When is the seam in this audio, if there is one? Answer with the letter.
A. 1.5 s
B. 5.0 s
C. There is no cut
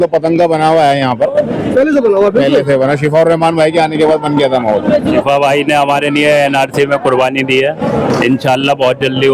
B